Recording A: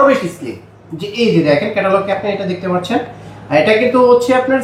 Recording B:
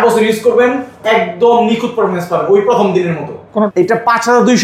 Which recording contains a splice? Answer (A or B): B